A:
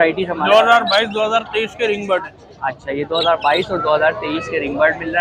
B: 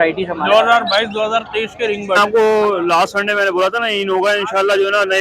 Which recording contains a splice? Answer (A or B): B